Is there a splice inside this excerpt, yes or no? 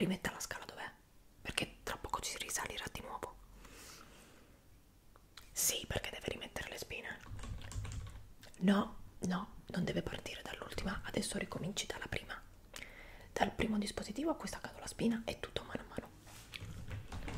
no